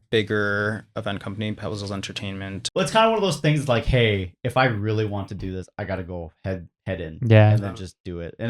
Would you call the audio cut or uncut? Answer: cut